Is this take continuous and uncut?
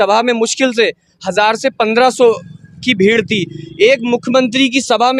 yes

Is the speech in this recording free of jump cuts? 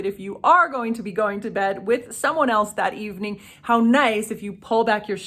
yes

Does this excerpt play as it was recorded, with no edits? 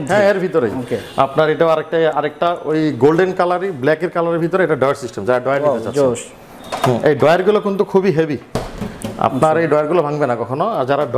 yes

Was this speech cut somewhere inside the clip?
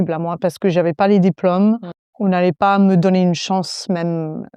no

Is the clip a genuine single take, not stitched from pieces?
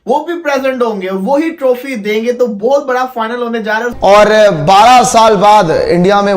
no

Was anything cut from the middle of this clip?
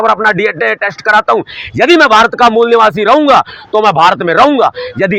no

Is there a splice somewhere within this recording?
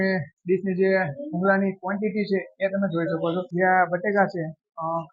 yes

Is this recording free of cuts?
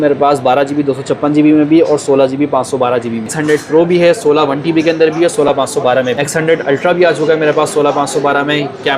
no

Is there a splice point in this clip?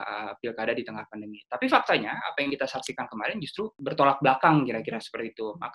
yes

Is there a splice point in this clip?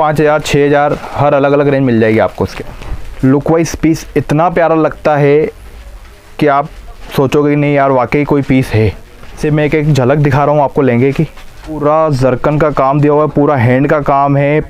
yes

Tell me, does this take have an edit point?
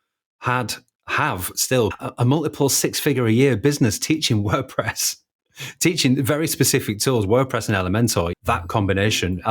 yes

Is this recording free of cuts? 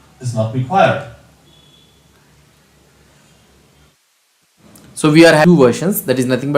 no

